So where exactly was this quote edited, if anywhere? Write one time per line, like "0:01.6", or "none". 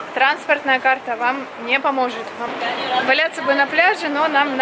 0:02.5